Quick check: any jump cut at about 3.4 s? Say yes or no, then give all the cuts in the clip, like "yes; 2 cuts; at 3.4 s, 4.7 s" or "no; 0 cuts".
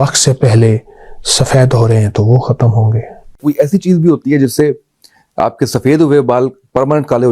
yes; 1 cut; at 3.4 s